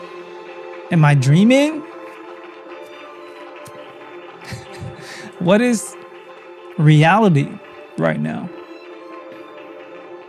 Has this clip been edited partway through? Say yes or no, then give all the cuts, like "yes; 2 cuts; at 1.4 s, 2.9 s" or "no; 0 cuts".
no; 0 cuts